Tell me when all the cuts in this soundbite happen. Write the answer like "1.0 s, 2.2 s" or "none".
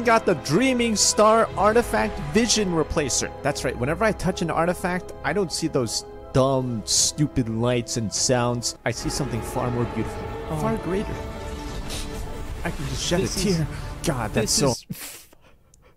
none